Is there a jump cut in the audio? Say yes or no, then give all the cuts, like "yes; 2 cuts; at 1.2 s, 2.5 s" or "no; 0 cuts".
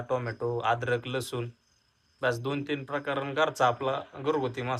no; 0 cuts